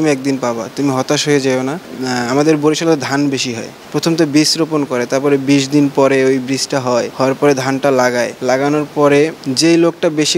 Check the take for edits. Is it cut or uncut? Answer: cut